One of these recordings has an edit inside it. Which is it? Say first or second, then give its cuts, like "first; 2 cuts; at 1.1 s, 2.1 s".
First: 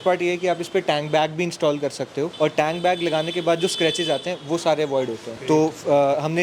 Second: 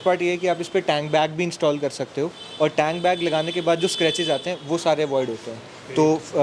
first; 2 cuts; at 2.3 s, 5.3 s